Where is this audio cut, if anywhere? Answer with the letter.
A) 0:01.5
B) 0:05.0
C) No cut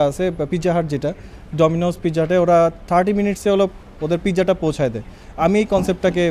C